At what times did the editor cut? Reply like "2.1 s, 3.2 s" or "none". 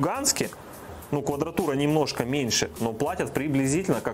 none